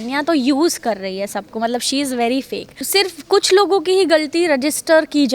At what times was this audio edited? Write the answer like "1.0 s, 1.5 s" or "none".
2.8 s